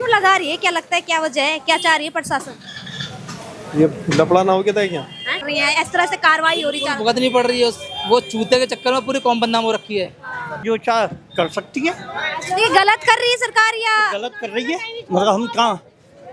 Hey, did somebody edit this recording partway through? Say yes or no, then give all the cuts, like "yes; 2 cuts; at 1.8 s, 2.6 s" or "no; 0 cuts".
yes; 2 cuts; at 5.5 s, 10.6 s